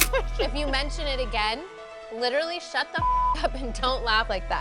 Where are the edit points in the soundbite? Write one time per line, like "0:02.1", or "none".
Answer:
none